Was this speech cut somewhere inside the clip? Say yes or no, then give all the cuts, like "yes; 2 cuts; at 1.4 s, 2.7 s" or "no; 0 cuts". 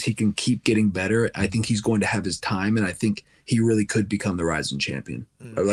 no; 0 cuts